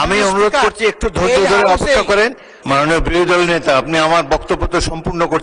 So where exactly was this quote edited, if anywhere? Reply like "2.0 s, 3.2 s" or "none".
2.5 s